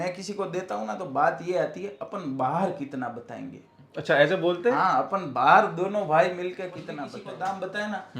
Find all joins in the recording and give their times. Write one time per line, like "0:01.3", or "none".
0:07.1